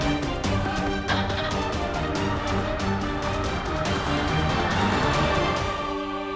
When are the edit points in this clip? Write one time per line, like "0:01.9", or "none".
0:05.4